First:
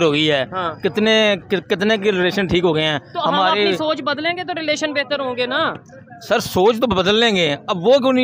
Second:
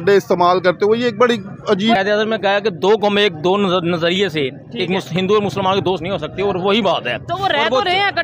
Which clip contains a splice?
second; 1 cut; at 2.0 s

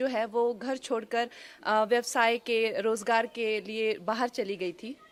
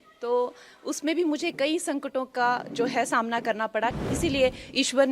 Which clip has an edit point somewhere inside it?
second; 1 cut; at 4.0 s

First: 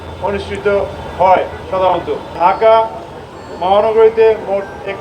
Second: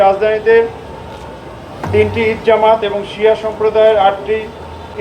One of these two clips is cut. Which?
first; 1 cut; at 2.3 s

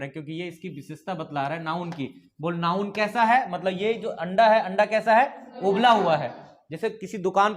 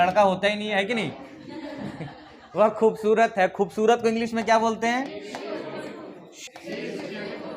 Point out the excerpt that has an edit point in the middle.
second; 1 cut; at 6.4 s

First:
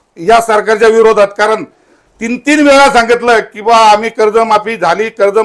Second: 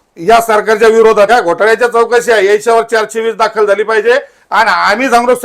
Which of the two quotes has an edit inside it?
second; 1 cut; at 1.3 s

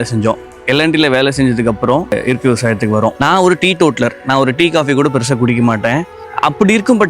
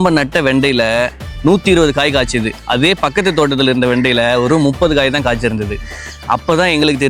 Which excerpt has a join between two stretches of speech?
first; 2 cuts; at 3.2 s, 6.2 s

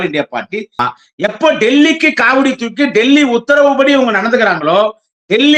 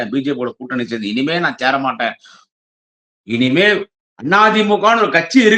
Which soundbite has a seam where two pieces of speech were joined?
first; 1 cut; at 1.0 s

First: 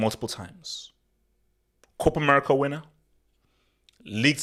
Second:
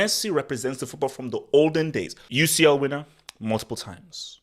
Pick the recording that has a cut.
second; 1 cut; at 2.2 s

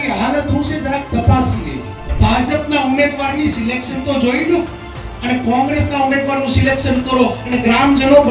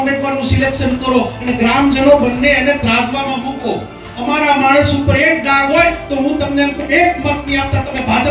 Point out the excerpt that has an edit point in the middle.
first; 1 cut; at 2.1 s

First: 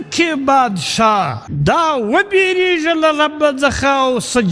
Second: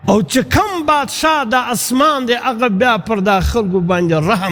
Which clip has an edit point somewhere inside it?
first; 1 cut; at 1.4 s

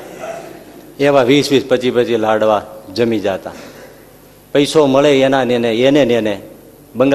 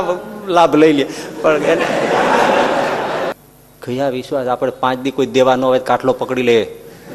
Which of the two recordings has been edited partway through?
second; 1 cut; at 3.4 s

